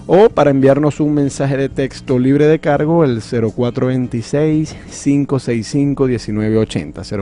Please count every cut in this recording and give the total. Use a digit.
1